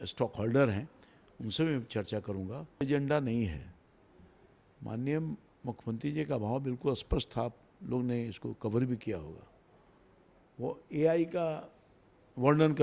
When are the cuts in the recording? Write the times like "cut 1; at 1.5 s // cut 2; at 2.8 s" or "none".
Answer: cut 1; at 2.8 s